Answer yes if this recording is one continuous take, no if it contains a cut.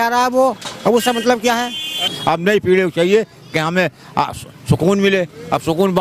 no